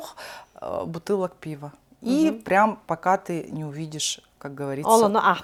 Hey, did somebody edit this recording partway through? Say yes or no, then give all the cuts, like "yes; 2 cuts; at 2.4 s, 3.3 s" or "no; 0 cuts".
no; 0 cuts